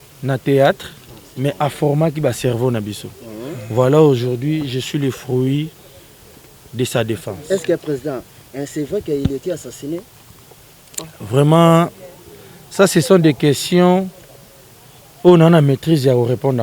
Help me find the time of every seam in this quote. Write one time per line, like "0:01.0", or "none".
none